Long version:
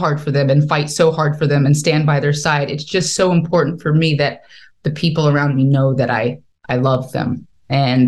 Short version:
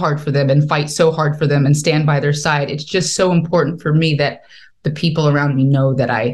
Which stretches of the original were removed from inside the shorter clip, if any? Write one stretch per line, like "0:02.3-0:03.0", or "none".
none